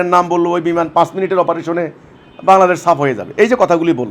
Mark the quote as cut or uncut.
uncut